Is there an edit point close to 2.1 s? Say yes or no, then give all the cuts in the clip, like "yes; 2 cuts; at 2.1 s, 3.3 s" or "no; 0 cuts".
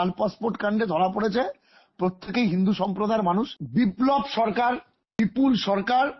no; 2 cuts; at 3.6 s, 5.0 s